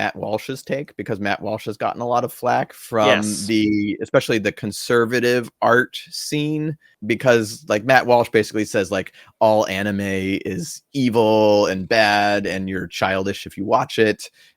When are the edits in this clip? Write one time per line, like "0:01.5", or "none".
0:06.9